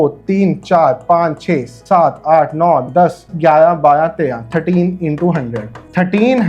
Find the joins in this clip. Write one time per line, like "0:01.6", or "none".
none

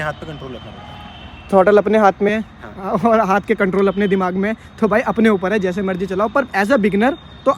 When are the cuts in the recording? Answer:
none

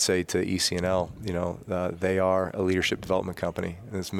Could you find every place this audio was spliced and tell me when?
none

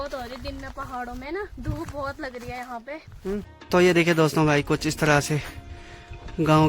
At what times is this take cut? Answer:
0:03.6

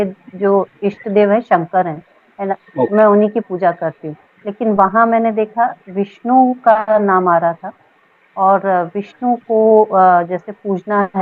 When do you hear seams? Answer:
none

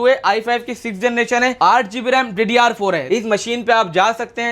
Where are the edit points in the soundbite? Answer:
0:01.5
0:03.0

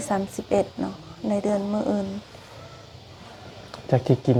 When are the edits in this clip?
none

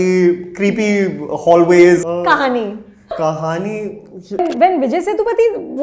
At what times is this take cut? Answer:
0:02.0
0:03.1
0:04.4

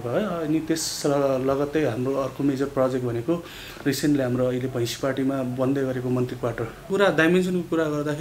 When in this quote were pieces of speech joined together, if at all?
0:06.9

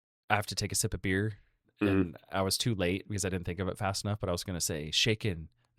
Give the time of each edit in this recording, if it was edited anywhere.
0:01.7

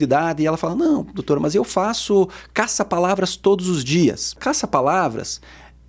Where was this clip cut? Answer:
0:04.4

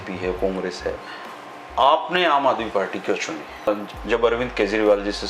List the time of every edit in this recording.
0:03.7

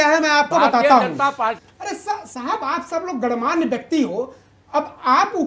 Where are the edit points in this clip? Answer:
0:01.6

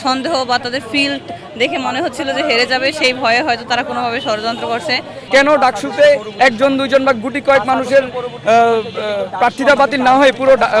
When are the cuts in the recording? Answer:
0:05.3

